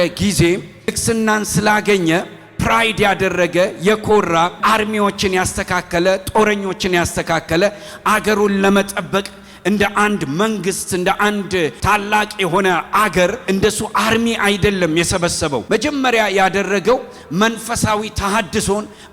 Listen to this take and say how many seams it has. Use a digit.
5